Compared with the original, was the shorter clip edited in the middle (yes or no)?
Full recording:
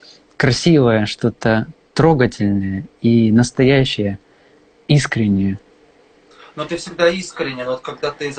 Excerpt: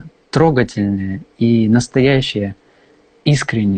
no